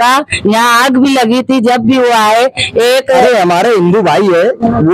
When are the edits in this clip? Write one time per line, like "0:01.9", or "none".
0:03.2